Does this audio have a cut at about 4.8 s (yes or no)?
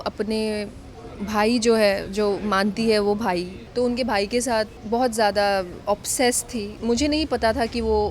yes